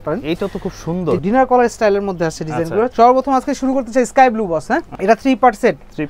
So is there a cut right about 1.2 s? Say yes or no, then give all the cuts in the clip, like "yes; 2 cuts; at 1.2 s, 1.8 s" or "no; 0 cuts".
yes; 3 cuts; at 1.2 s, 2.9 s, 4.9 s